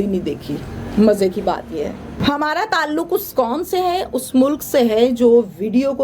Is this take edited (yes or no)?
yes